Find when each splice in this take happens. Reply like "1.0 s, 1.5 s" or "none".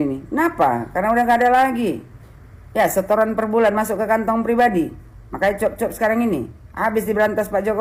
none